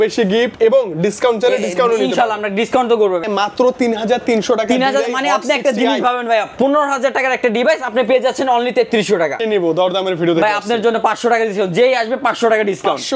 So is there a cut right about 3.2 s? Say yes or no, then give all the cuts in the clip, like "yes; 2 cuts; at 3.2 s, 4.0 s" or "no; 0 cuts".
yes; 2 cuts; at 3.2 s, 9.4 s